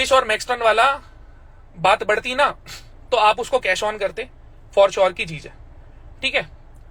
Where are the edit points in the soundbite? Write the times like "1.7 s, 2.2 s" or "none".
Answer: none